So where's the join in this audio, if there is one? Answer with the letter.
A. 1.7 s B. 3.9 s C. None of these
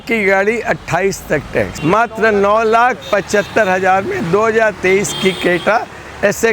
A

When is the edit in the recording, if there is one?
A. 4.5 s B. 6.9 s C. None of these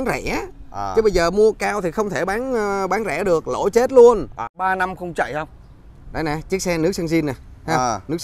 A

